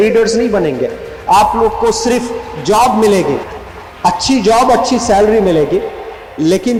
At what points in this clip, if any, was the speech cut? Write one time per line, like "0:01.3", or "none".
none